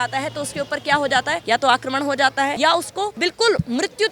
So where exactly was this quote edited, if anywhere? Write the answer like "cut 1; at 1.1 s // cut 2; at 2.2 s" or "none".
cut 1; at 1.4 s // cut 2; at 2.9 s